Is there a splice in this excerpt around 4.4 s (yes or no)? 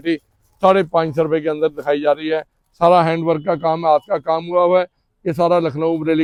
no